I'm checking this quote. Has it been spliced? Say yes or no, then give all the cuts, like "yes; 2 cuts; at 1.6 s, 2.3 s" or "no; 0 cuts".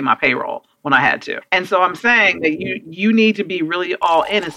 yes; 1 cut; at 1.4 s